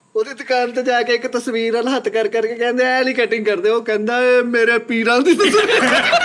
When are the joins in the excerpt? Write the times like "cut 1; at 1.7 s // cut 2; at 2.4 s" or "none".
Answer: none